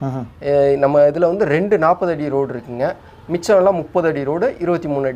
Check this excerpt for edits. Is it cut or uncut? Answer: uncut